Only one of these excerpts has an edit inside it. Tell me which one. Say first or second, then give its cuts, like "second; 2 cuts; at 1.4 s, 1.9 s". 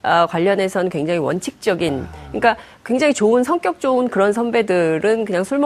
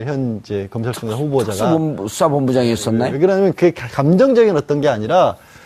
second; 1 cut; at 2.8 s